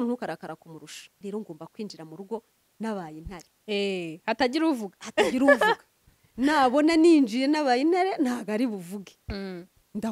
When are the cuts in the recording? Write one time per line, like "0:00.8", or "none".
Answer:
0:01.2